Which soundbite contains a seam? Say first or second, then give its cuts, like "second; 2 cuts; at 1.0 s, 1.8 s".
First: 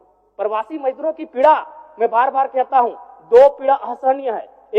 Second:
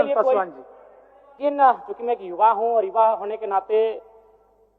second; 1 cut; at 1.4 s